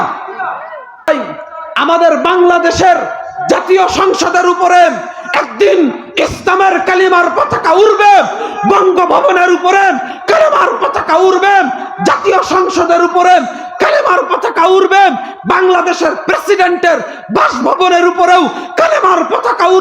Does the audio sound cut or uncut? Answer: cut